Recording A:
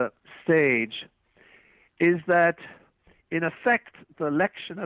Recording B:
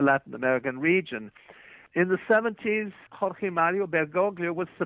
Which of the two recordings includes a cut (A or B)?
B